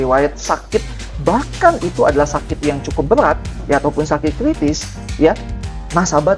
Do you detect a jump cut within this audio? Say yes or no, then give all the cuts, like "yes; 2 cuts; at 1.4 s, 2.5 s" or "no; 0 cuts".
no; 0 cuts